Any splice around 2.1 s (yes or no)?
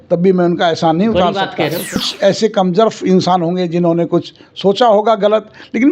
yes